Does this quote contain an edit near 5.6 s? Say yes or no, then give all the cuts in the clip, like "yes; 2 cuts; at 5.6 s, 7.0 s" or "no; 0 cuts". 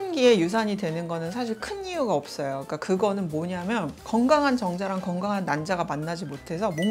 no; 0 cuts